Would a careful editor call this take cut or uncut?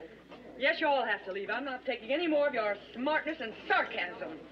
cut